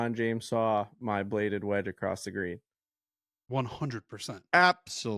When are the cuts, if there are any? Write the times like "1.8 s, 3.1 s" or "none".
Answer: none